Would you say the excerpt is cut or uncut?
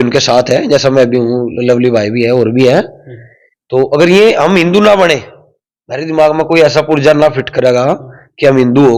uncut